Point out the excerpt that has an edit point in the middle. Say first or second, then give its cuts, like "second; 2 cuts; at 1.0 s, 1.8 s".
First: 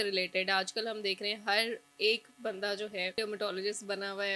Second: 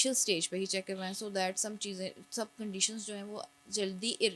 first; 1 cut; at 3.1 s